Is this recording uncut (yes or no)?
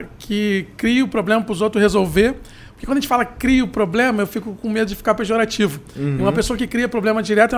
yes